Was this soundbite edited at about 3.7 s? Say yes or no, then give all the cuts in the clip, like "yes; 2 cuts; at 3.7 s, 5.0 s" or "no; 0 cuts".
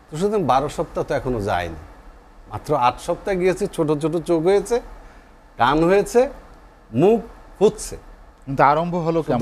no; 0 cuts